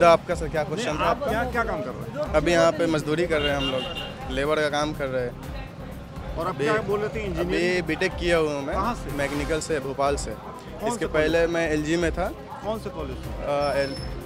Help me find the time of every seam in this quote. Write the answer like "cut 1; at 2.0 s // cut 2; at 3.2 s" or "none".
none